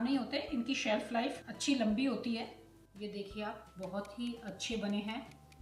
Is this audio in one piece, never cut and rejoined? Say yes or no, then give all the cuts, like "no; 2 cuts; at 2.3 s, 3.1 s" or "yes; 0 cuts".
no; 1 cut; at 2.8 s